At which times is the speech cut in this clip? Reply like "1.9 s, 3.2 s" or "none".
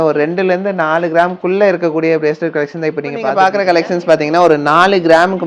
3.3 s